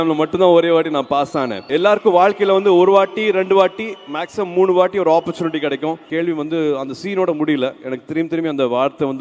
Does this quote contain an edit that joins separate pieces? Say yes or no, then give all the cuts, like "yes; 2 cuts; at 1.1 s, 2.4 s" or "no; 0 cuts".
yes; 2 cuts; at 1.6 s, 6.1 s